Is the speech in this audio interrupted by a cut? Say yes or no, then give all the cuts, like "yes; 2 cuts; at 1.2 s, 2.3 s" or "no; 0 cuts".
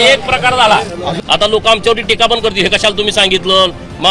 yes; 1 cut; at 1.3 s